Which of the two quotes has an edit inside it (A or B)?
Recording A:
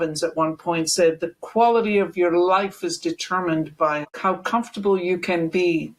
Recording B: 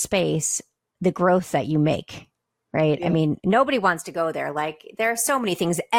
A